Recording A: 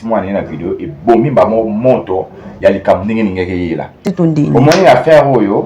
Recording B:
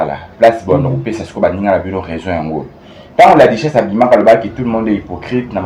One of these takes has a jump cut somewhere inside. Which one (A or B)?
A